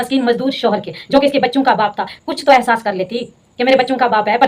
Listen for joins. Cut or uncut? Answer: uncut